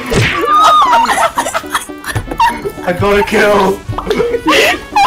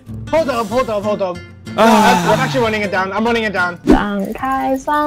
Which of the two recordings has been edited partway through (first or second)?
second